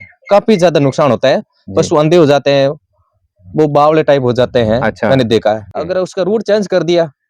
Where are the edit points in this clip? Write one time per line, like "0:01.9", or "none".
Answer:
0:05.7